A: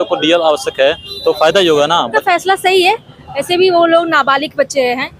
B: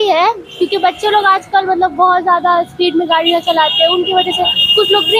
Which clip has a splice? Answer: A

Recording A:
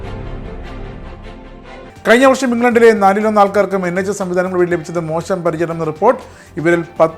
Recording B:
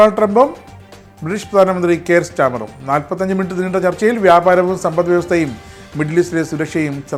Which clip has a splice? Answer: A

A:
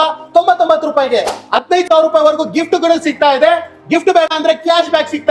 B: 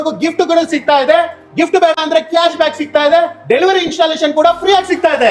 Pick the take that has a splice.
A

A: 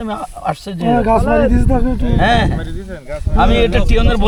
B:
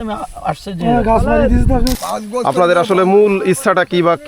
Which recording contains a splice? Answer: B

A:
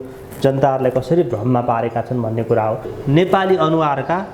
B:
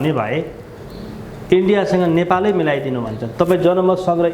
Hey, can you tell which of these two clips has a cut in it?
A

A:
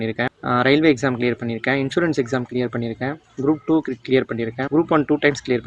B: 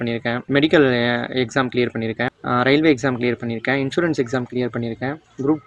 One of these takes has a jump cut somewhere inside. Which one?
A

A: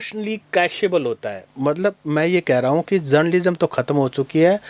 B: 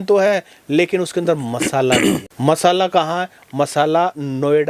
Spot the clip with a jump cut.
A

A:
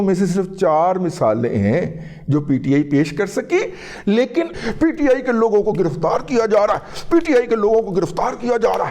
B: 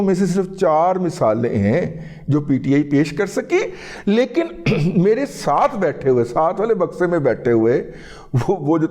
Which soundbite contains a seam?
A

